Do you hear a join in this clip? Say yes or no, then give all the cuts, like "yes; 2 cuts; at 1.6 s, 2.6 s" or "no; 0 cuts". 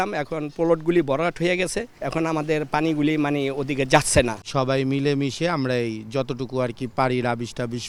no; 0 cuts